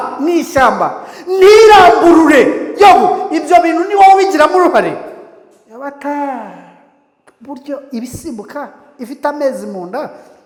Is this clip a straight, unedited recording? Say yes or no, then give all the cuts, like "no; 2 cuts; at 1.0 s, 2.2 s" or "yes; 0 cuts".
yes; 0 cuts